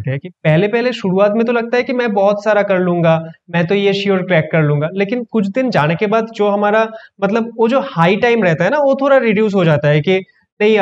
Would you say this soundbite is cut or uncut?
uncut